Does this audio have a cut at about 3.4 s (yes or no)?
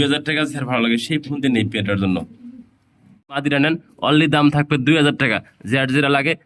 yes